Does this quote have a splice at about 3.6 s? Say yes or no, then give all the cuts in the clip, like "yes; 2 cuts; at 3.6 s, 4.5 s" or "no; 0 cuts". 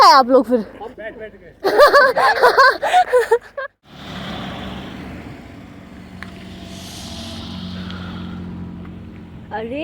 yes; 1 cut; at 3.6 s